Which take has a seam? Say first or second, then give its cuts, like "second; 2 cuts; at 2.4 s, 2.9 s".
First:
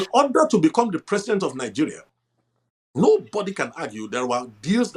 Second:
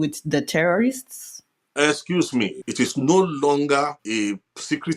second; 2 cuts; at 2.6 s, 4.0 s